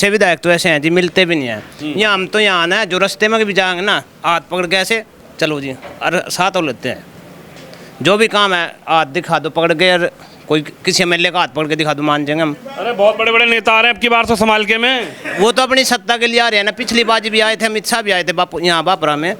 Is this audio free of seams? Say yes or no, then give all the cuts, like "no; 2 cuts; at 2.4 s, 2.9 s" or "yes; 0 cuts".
yes; 0 cuts